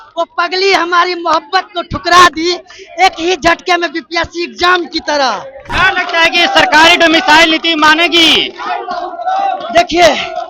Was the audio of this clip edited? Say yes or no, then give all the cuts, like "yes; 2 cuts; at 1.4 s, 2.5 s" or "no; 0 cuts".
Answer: yes; 1 cut; at 5.6 s